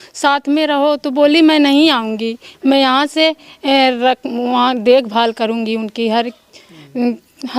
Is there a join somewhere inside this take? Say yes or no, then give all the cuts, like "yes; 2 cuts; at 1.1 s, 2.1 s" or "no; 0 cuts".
no; 0 cuts